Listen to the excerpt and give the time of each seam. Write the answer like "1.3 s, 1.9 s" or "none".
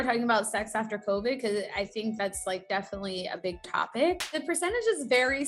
4.3 s